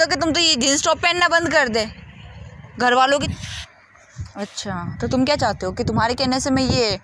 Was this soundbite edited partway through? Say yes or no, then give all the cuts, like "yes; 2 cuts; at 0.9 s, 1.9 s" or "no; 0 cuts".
yes; 1 cut; at 3.2 s